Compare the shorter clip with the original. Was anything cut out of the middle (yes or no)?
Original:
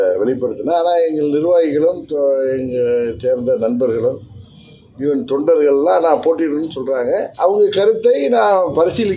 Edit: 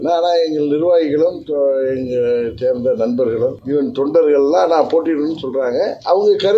yes